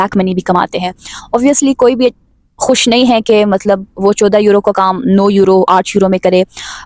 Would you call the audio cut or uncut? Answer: uncut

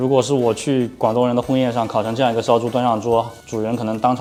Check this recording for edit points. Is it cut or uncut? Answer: uncut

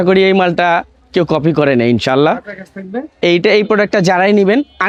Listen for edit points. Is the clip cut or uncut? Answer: uncut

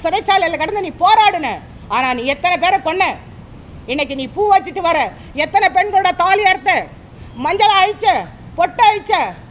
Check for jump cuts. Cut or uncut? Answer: uncut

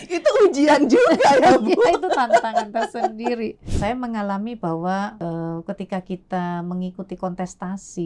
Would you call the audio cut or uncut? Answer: cut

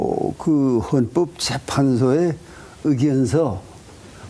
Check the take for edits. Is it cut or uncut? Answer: cut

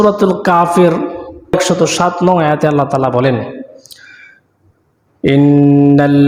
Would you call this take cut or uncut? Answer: uncut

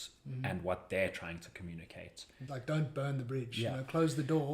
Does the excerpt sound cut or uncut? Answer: cut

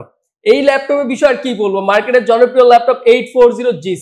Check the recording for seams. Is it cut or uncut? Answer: uncut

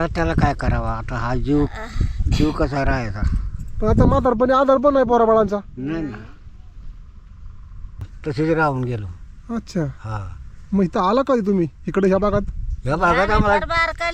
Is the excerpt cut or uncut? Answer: cut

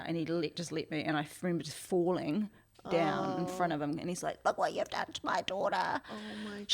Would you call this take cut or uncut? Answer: uncut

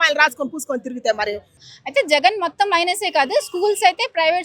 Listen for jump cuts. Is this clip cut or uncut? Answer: cut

